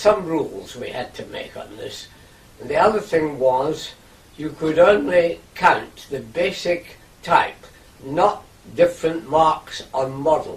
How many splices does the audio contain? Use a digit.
1